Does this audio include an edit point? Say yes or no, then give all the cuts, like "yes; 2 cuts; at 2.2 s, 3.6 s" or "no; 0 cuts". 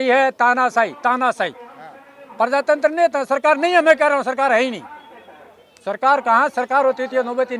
no; 0 cuts